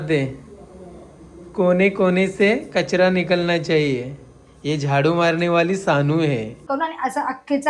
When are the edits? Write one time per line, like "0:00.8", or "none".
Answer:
0:06.6